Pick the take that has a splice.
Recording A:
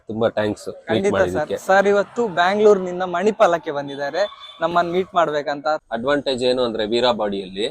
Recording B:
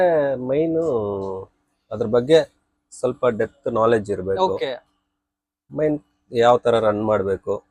A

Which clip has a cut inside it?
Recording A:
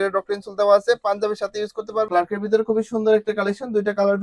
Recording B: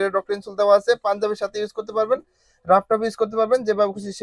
A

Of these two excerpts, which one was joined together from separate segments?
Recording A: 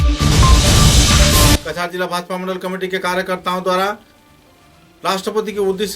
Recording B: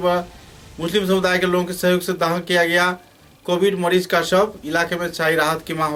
A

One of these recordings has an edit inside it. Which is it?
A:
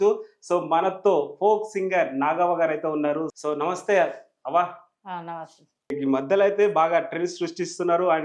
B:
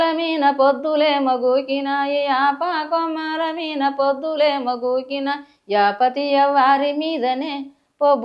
A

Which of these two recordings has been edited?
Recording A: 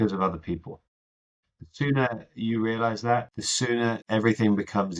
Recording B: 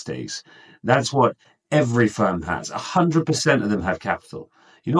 A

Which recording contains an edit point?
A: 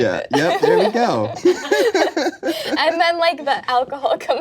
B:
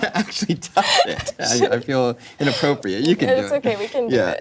A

